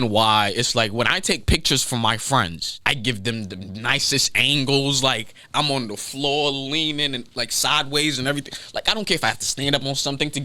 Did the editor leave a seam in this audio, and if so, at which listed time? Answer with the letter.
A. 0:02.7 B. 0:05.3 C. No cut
A